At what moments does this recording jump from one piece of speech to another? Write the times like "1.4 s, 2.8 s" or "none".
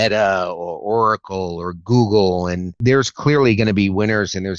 2.8 s